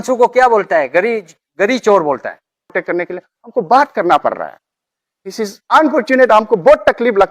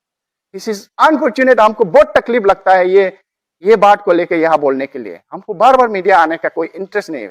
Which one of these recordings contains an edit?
first; 1 cut; at 2.7 s

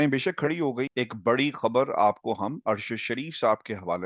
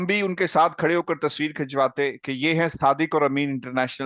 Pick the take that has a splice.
first; 1 cut; at 0.9 s

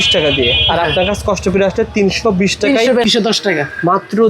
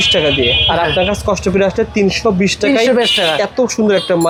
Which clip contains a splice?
first; 1 cut; at 3.1 s

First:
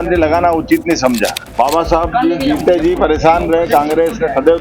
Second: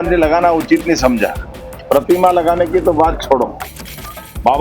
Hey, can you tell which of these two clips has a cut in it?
first; 1 cut; at 1.4 s

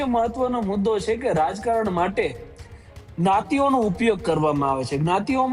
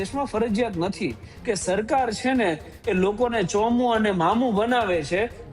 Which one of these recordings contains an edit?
second; 1 cut; at 1.3 s

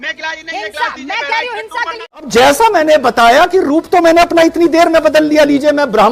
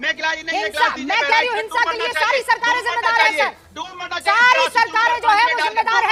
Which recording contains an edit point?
first; 1 cut; at 2.3 s

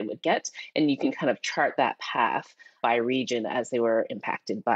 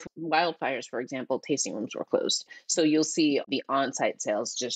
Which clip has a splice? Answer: second; 2 cuts; at 2.5 s, 3.4 s

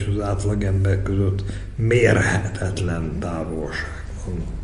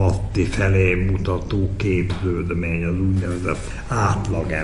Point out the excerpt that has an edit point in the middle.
second; 1 cut; at 3.6 s

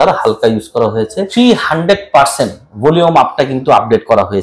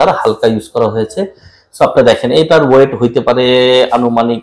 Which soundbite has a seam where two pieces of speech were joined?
first; 1 cut; at 1.3 s

